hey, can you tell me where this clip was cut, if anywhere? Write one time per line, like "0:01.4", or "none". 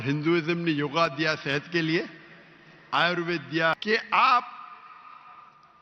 0:03.8